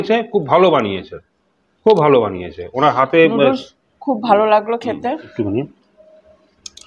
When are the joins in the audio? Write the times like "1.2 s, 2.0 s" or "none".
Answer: 5.3 s